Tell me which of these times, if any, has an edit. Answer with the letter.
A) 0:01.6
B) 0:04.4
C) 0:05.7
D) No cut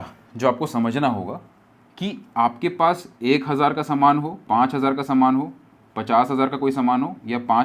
D